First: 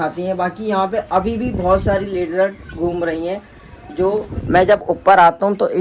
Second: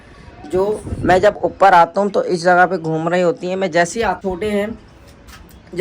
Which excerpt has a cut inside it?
second; 1 cut; at 4.2 s

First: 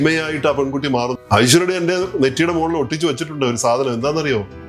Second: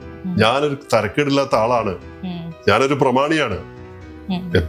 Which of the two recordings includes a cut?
first; 1 cut; at 1.1 s

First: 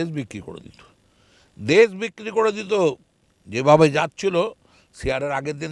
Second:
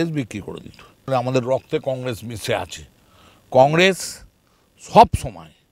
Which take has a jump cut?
second; 1 cut; at 1.0 s

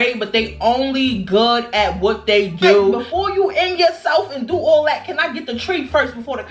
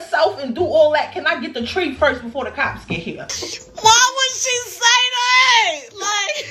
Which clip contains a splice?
first; 1 cut; at 3.0 s

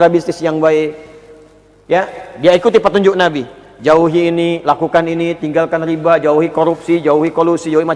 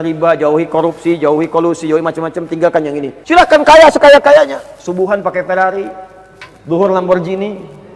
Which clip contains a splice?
second; 1 cut; at 3.1 s

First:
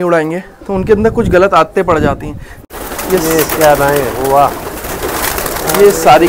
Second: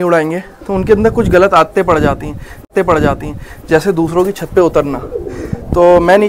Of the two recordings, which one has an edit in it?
first; 1 cut; at 2.6 s

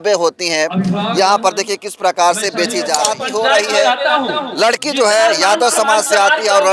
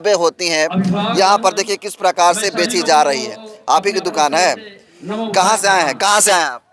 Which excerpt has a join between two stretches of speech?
first; 1 cut; at 3.0 s

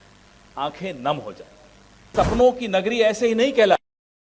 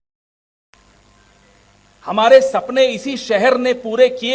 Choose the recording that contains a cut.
first; 1 cut; at 2.1 s

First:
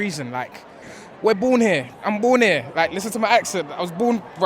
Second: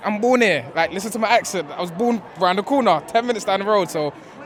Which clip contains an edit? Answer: first; 1 cut; at 0.9 s

